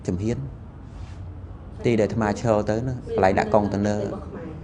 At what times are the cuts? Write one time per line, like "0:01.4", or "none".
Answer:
none

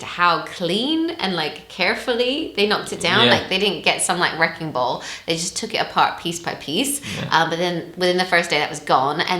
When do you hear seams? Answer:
none

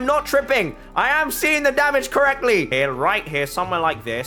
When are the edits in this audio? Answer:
0:02.7

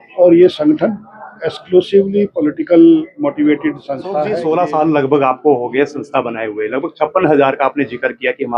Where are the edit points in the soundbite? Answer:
0:04.2

